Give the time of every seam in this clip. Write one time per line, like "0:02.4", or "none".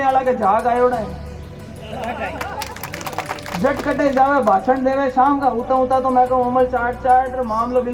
none